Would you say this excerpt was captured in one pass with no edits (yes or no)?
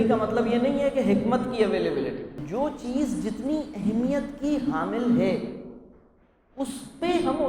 no